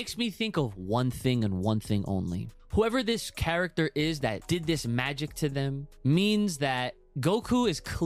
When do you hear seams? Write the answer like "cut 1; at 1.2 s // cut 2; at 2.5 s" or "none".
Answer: cut 1; at 2.5 s // cut 2; at 4.4 s // cut 3; at 5.9 s // cut 4; at 7.0 s